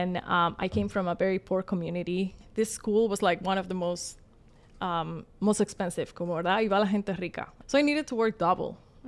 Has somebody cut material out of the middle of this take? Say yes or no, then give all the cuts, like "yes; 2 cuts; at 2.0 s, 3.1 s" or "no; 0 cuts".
yes; 2 cuts; at 2.4 s, 7.5 s